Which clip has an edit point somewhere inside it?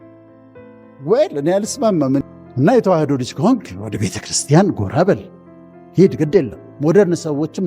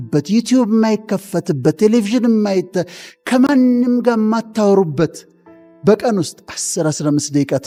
first; 1 cut; at 2.2 s

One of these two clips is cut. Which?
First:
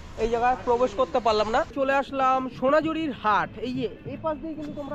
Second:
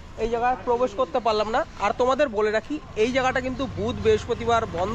first; 1 cut; at 1.7 s

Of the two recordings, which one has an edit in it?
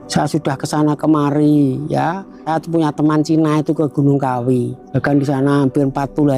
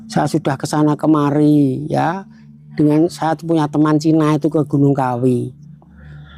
first; 2 cuts; at 2.4 s, 4.8 s

